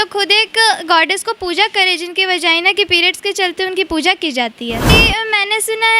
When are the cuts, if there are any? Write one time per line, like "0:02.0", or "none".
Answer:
0:04.9

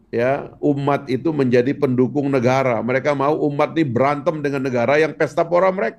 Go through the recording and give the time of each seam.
none

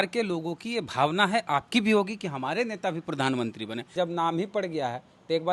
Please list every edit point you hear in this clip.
0:03.9

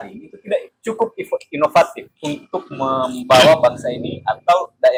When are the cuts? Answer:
none

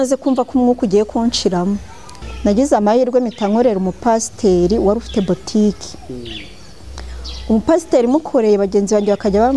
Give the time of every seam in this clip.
0:02.1

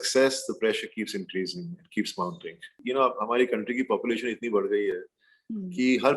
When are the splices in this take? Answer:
0:02.8

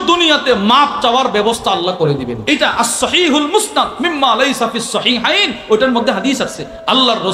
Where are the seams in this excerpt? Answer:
0:02.4

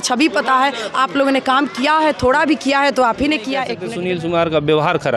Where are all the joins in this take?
0:03.8

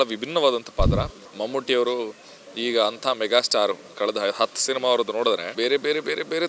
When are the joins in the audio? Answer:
0:01.2
0:05.5

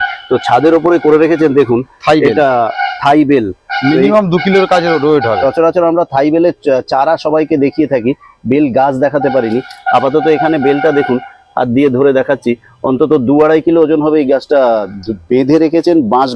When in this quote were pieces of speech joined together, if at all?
none

